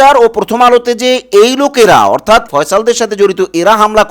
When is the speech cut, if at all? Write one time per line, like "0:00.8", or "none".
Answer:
0:02.5